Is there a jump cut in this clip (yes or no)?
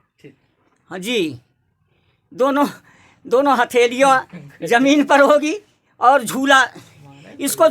no